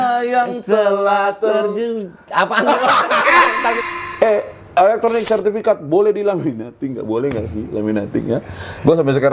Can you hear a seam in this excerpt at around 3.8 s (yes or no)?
yes